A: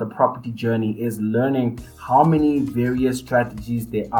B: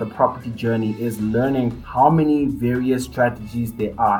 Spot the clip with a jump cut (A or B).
B